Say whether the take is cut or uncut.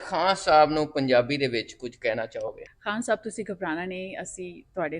cut